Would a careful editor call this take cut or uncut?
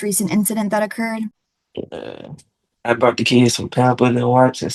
cut